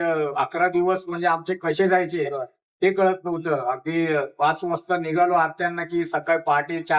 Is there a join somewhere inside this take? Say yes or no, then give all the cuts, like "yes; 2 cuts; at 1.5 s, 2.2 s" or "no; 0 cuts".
no; 0 cuts